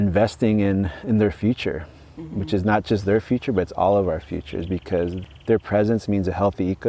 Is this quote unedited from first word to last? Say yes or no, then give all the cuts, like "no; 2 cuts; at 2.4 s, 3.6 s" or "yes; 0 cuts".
no; 1 cut; at 5.2 s